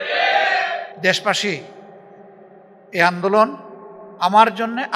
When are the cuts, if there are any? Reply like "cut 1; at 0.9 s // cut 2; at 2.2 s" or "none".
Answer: cut 1; at 0.9 s